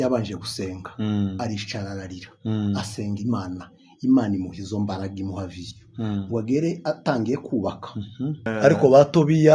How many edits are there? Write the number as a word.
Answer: one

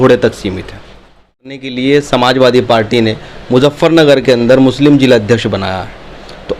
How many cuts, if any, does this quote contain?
one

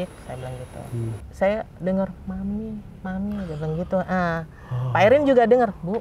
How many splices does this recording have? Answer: one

